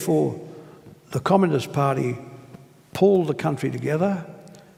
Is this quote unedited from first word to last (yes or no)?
yes